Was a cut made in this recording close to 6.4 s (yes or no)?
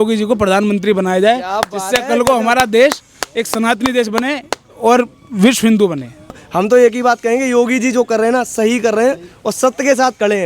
yes